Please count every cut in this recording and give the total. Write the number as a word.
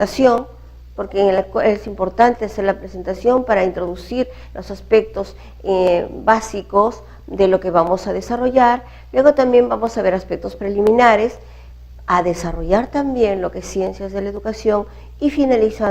one